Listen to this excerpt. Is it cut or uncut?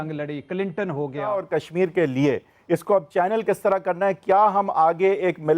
cut